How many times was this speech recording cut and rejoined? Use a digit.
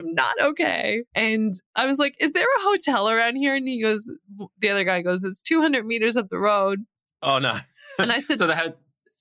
1